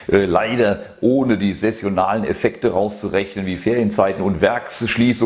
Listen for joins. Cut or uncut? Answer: cut